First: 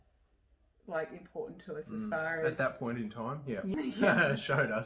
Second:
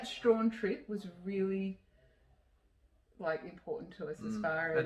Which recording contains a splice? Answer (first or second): first